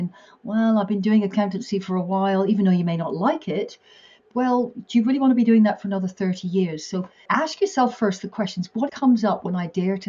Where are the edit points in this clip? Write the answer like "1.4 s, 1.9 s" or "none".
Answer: 4.2 s, 7.1 s, 8.9 s